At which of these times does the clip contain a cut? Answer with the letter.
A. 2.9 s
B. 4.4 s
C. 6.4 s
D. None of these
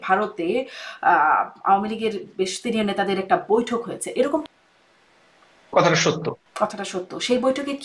B